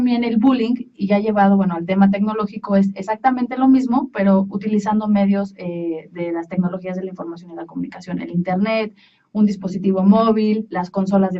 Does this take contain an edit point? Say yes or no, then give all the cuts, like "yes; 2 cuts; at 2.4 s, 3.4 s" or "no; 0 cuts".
no; 0 cuts